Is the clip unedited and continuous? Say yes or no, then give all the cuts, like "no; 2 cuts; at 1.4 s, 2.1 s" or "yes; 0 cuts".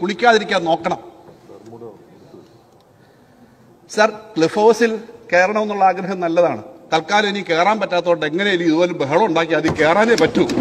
yes; 0 cuts